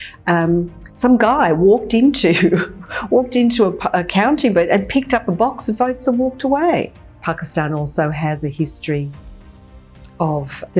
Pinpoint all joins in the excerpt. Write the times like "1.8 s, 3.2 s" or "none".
6.9 s

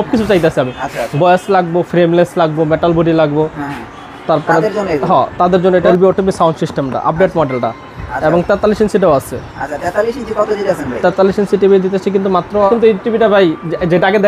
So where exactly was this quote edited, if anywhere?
5.9 s, 12.7 s

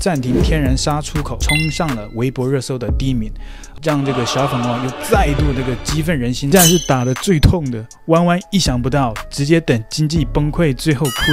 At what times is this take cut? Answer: 1.4 s, 6.5 s

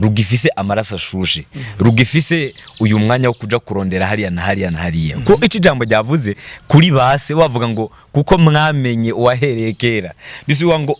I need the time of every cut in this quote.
none

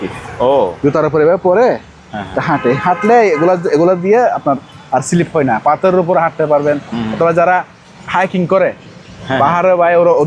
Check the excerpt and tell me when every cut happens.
none

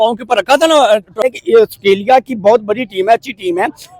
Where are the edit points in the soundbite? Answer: 1.2 s

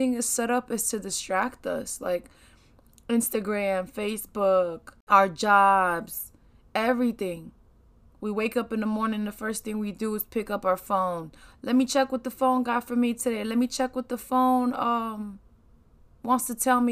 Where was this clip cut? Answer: 4.9 s

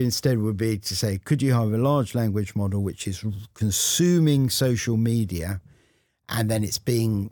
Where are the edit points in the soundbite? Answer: none

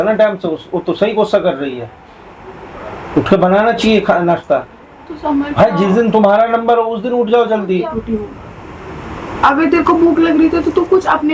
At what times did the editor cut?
7.9 s

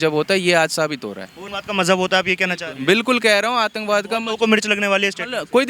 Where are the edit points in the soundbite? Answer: none

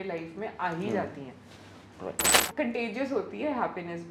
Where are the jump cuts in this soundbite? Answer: 2.5 s

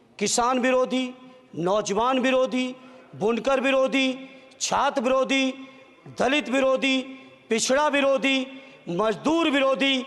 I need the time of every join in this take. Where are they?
none

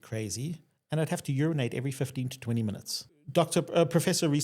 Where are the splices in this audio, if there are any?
3.0 s

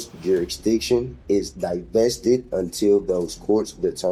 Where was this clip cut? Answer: none

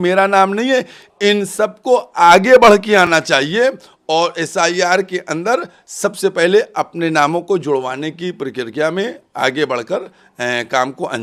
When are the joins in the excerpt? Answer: none

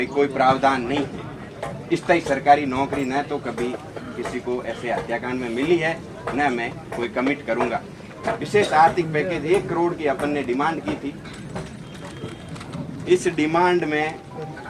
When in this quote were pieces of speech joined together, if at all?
8.4 s

